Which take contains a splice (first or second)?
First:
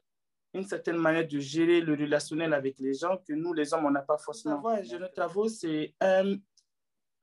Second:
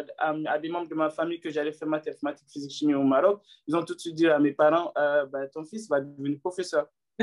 first